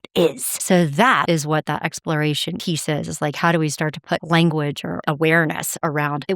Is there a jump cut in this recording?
yes; 1 cut; at 1.2 s

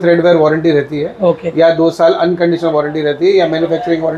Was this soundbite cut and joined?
no; 0 cuts

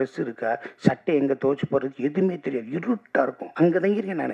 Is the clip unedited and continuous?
no; 1 cut; at 3.4 s

